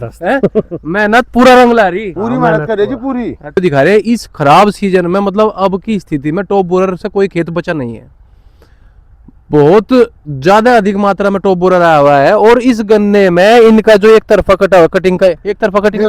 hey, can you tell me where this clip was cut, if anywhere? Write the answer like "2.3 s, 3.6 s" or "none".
3.6 s